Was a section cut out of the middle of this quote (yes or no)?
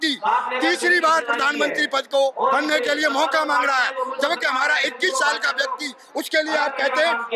yes